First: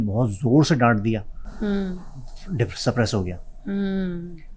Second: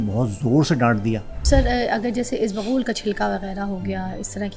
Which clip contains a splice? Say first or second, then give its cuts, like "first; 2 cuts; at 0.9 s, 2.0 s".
second; 1 cut; at 1.3 s